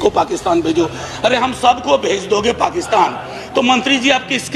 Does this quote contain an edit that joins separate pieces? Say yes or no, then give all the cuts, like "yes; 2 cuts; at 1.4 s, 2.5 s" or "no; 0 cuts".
no; 0 cuts